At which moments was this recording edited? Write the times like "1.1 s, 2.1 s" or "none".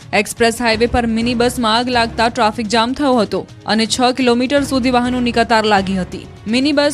3.9 s